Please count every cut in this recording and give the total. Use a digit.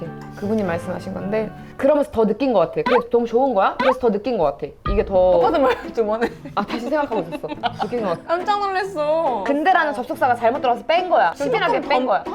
3